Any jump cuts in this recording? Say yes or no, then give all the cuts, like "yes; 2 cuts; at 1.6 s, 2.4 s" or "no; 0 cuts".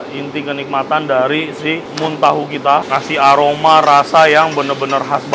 yes; 1 cut; at 2.9 s